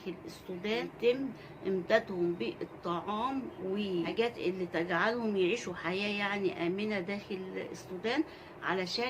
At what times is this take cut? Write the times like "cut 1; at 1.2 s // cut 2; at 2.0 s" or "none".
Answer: cut 1; at 0.9 s // cut 2; at 4.1 s

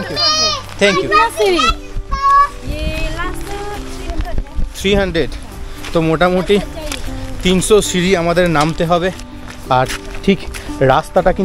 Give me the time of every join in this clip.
cut 1; at 9.2 s

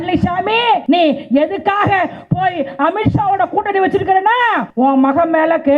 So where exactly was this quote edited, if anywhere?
cut 1; at 0.8 s // cut 2; at 4.7 s

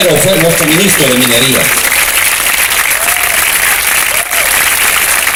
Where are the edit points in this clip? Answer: none

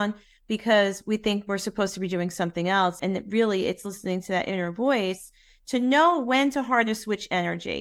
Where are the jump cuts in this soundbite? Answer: cut 1; at 3.0 s

